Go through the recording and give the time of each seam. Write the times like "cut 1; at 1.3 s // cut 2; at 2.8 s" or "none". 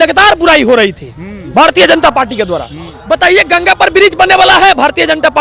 cut 1; at 2.9 s